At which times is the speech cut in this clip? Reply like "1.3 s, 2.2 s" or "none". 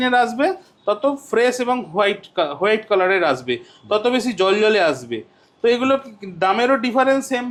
none